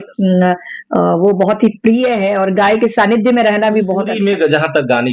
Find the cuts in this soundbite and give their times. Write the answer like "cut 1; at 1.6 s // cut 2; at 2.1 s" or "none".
cut 1; at 4.1 s